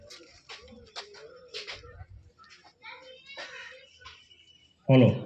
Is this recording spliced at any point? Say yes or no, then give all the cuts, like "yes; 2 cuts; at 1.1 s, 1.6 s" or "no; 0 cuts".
no; 0 cuts